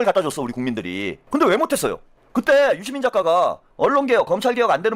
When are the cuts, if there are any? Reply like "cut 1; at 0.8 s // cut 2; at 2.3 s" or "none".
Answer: cut 1; at 1.1 s // cut 2; at 3.6 s